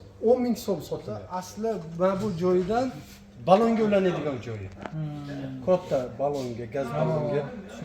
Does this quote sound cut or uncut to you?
cut